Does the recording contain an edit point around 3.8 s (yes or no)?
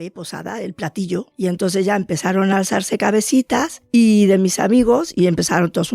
yes